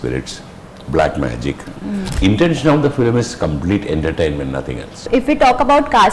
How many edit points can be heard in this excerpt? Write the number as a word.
two